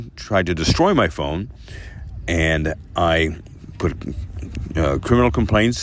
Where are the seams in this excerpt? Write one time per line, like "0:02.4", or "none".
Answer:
none